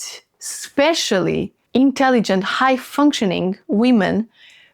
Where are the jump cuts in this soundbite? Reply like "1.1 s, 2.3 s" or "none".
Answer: 1.6 s